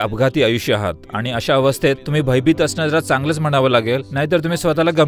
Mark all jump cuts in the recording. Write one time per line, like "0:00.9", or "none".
0:02.0
0:04.1